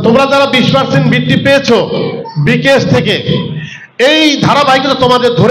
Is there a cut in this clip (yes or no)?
no